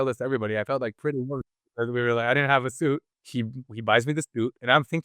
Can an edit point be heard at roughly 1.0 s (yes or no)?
no